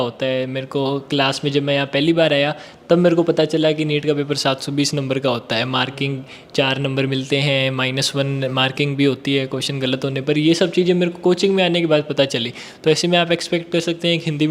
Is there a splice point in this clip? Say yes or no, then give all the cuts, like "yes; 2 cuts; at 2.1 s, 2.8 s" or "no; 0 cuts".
no; 0 cuts